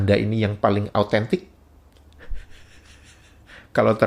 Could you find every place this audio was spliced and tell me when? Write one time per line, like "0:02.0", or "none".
none